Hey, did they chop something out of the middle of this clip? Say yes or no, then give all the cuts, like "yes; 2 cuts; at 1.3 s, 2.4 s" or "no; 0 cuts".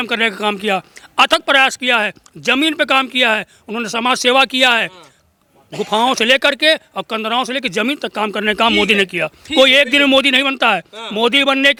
no; 0 cuts